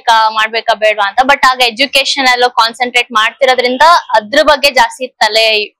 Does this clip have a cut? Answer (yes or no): no